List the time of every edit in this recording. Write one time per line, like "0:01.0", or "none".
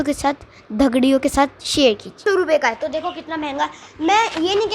0:02.2